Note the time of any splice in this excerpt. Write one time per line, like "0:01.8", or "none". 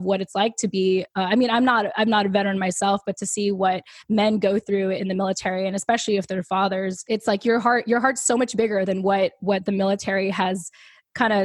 0:07.0